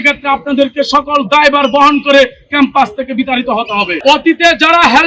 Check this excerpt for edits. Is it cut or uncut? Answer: cut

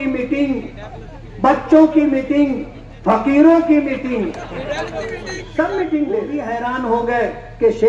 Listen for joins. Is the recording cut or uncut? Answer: cut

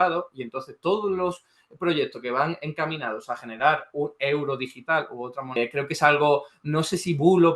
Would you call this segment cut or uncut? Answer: cut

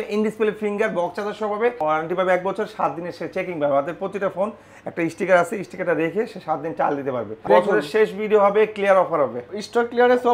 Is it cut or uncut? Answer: cut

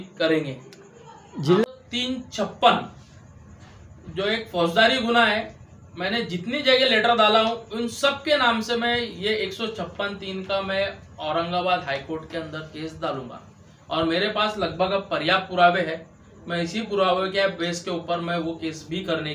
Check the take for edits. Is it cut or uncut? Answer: cut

